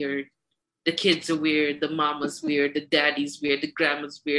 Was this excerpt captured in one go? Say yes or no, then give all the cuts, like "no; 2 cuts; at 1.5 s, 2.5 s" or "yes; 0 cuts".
yes; 0 cuts